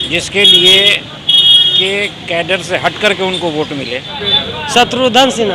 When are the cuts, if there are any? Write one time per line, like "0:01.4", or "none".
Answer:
0:04.2